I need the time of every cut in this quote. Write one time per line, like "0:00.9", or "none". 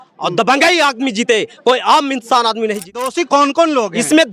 0:03.1